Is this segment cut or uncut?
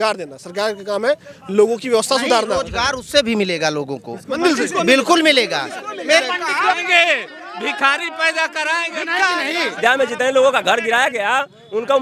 cut